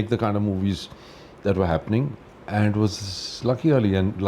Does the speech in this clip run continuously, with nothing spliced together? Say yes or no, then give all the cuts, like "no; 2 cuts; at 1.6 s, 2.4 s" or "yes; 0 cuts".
no; 1 cut; at 2.1 s